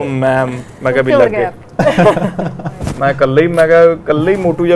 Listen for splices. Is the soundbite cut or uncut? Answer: uncut